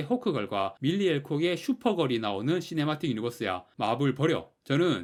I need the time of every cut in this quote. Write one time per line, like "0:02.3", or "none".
none